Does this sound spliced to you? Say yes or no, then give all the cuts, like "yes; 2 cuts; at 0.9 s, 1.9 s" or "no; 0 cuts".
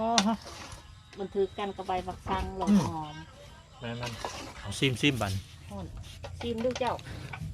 yes; 1 cut; at 4.7 s